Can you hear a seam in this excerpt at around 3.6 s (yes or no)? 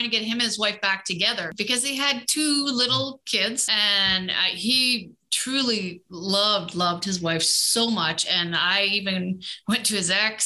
yes